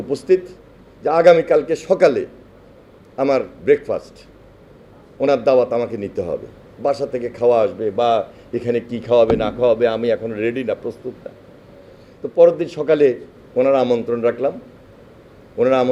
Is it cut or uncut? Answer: uncut